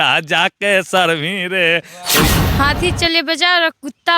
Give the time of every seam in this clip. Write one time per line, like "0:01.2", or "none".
0:02.3